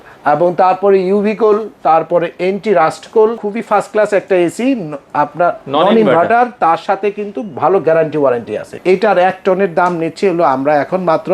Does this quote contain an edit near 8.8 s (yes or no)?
yes